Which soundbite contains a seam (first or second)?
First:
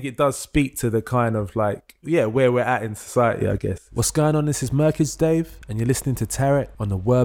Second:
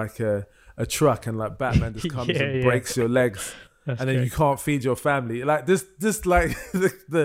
first